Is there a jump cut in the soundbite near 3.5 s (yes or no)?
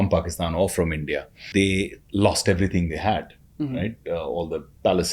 no